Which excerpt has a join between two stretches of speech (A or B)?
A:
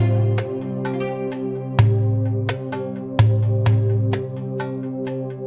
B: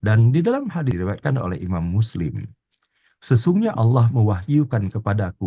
B